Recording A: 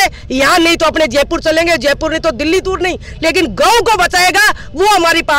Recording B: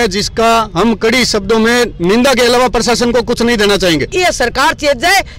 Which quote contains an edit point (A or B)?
B